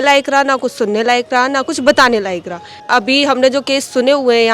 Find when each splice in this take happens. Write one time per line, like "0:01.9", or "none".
0:02.7